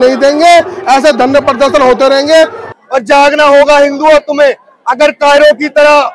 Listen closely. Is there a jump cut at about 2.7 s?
yes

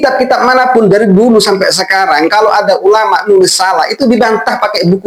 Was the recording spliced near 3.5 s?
no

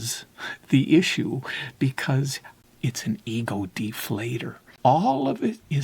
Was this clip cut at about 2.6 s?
yes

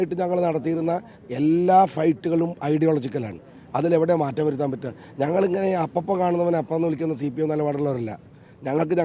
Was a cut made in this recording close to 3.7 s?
no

